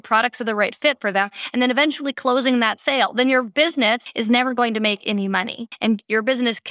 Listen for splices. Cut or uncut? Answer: cut